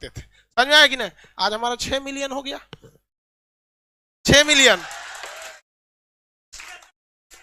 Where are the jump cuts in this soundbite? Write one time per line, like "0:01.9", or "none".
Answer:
none